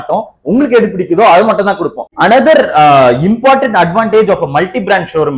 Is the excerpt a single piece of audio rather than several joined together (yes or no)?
yes